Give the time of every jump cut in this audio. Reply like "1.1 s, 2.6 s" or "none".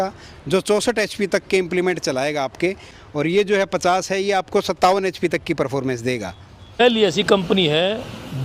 2.9 s, 6.8 s